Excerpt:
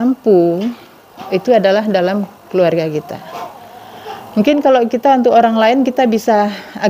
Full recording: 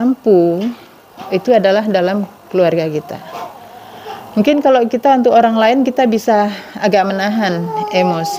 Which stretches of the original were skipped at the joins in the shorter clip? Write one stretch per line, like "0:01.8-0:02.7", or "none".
none